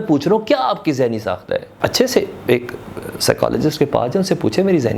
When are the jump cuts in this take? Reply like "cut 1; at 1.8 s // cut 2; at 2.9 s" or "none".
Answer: cut 1; at 1.7 s